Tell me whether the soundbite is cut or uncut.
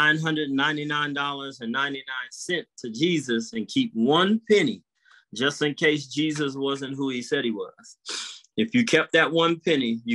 uncut